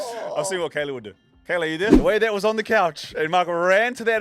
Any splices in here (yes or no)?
yes